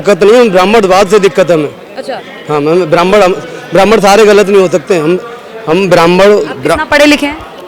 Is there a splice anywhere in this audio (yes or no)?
no